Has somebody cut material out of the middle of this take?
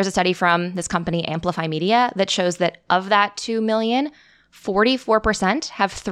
no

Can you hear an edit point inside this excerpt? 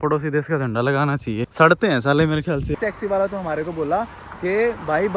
yes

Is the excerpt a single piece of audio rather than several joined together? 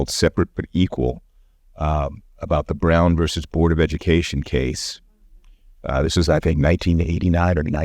yes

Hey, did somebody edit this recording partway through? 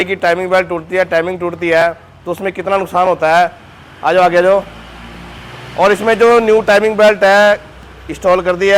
no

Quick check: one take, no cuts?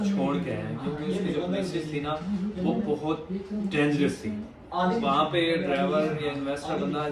yes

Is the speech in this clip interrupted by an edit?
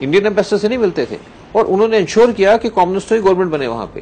no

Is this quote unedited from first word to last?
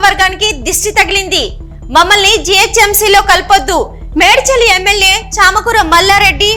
yes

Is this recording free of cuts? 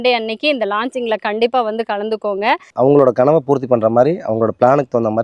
no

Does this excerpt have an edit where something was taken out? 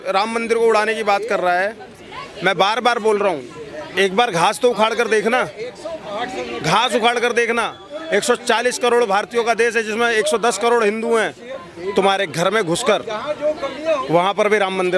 no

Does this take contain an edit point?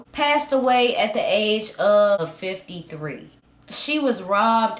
yes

